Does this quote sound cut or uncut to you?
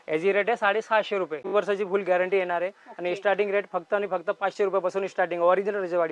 cut